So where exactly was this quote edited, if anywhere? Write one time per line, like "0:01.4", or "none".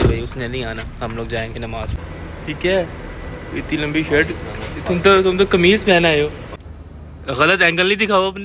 0:01.9
0:06.6